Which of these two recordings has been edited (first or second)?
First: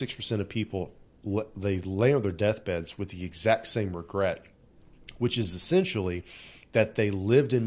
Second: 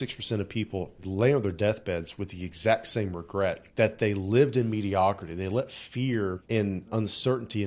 second